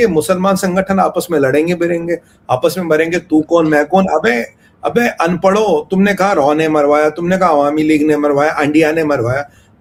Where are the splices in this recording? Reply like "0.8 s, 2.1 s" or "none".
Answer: none